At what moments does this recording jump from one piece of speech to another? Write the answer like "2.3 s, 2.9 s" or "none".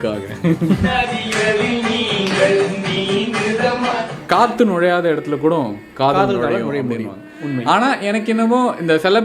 0.9 s, 4.1 s

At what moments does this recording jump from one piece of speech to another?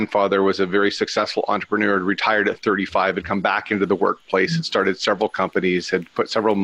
none

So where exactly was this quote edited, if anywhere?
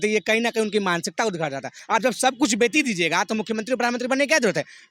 1.7 s

